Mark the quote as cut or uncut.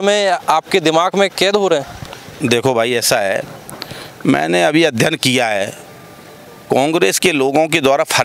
uncut